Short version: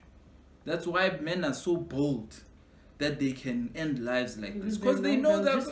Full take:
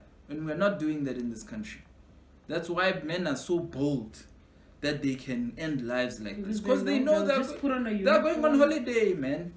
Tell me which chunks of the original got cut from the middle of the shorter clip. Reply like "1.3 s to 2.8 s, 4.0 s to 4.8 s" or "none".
none